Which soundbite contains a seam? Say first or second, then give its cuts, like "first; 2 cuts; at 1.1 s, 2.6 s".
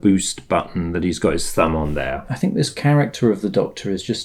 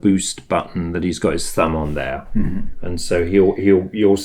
first; 1 cut; at 2.3 s